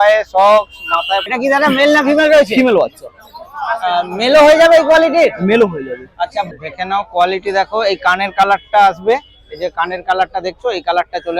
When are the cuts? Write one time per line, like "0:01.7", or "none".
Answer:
0:01.2
0:06.5